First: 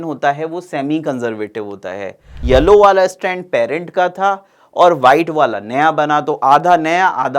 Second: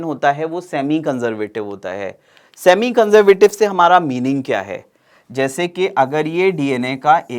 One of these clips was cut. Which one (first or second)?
first